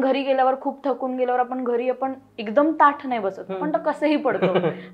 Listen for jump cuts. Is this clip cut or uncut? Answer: uncut